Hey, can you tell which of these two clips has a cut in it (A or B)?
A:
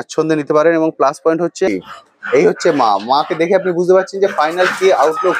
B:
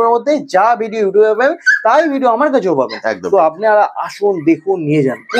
A